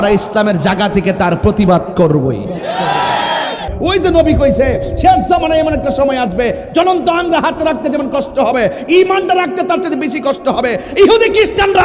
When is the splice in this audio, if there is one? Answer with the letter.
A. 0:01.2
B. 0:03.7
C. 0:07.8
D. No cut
B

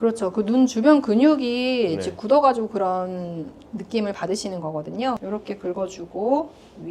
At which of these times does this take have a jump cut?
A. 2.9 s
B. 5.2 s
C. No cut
B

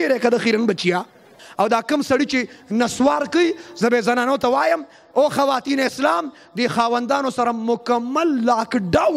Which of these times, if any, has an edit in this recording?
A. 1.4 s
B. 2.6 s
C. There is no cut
A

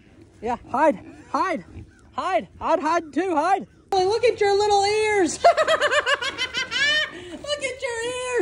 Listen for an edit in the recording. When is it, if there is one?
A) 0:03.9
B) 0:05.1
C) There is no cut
A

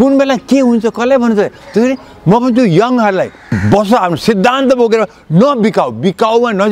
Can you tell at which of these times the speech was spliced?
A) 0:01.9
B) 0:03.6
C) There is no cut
B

